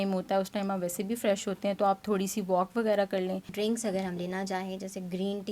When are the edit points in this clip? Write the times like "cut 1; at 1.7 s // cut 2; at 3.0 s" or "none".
cut 1; at 3.5 s